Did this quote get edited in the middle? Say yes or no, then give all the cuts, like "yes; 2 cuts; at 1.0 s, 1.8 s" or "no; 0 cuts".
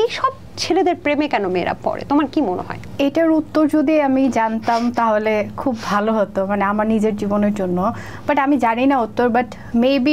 no; 0 cuts